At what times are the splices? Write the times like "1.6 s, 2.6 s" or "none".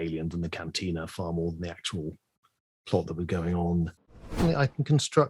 4.4 s